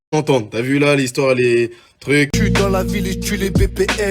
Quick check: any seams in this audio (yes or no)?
yes